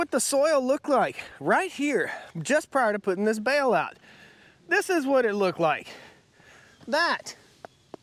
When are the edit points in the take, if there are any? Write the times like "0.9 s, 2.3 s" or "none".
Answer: none